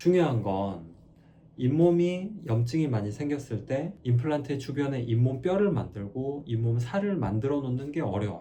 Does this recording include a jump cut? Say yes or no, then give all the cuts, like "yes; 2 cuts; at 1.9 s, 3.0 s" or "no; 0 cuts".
no; 0 cuts